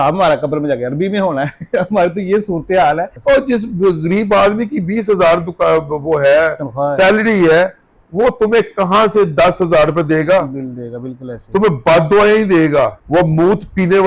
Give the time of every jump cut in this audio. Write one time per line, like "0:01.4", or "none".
0:03.1
0:13.0